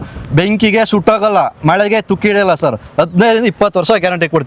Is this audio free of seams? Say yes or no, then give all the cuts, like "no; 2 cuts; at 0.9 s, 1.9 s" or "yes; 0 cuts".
yes; 0 cuts